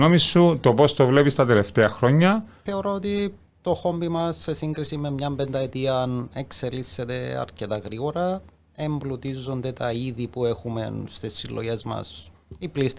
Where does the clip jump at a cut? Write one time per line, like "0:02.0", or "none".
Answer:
0:02.6